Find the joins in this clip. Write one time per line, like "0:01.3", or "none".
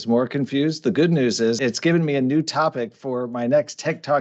0:01.6